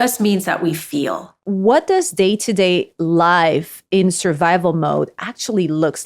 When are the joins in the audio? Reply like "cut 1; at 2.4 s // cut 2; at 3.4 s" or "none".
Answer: cut 1; at 1.4 s